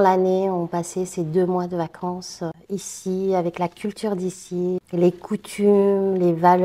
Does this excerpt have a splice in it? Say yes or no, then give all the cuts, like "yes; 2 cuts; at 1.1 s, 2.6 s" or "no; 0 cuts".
no; 0 cuts